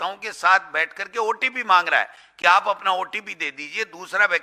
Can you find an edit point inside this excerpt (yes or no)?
no